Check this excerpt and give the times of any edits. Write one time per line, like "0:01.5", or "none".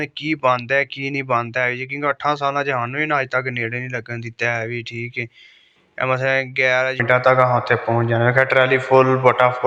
0:07.0